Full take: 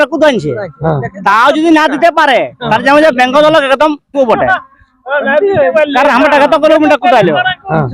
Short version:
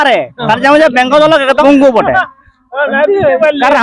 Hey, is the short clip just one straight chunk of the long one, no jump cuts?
no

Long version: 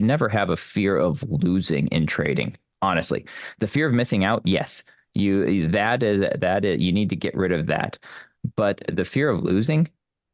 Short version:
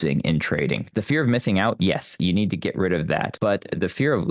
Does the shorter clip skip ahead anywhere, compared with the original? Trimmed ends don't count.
yes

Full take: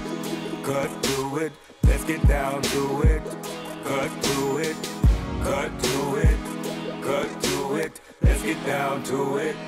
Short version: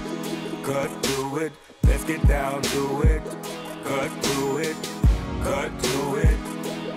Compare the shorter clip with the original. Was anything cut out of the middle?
no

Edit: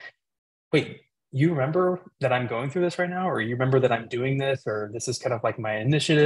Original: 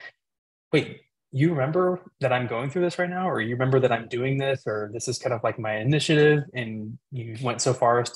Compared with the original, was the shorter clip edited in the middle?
no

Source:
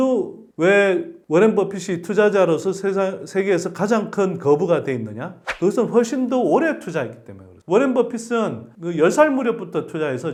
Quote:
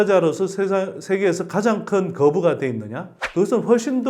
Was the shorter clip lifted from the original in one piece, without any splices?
yes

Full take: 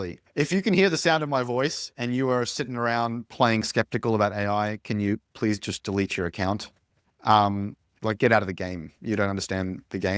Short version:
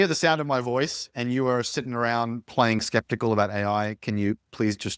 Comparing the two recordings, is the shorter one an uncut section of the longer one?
yes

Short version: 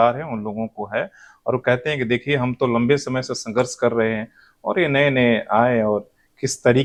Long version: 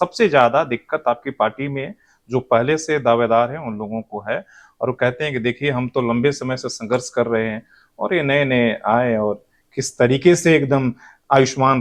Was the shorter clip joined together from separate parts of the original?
no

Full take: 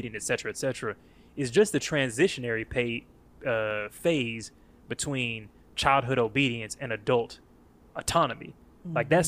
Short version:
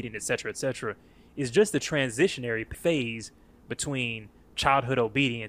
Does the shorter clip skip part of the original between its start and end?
yes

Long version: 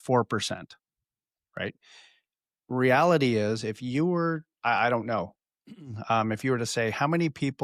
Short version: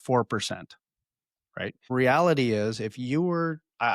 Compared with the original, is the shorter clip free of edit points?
no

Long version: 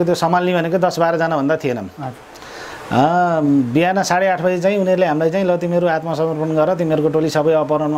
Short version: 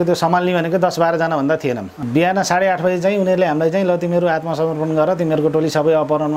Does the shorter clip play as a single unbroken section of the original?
no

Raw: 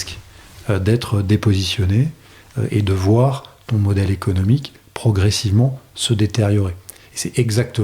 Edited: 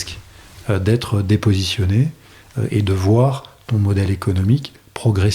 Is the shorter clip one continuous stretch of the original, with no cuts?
yes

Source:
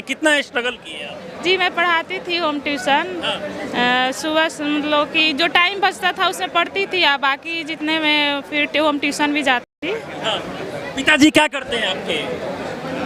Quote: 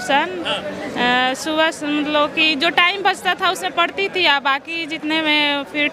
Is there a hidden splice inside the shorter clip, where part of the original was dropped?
no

